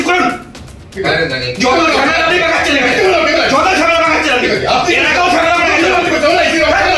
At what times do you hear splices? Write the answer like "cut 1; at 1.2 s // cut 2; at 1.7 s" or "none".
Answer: none